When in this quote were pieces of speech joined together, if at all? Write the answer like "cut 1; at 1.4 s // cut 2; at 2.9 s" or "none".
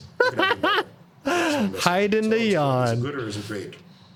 none